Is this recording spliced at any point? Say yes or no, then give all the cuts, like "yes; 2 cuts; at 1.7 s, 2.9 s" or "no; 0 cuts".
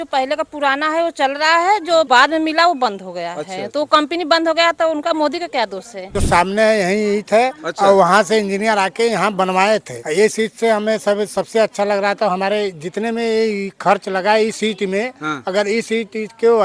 yes; 3 cuts; at 2.1 s, 6.2 s, 10.0 s